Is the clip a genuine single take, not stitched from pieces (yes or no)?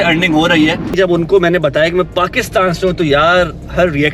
no